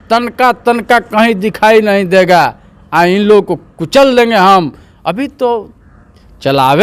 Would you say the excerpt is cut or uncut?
uncut